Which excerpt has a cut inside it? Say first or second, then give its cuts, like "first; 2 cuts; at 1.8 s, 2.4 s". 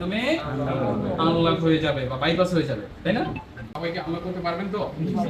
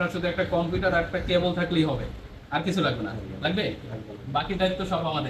first; 1 cut; at 3.7 s